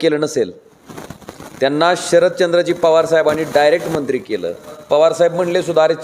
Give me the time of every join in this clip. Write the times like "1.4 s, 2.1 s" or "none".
4.7 s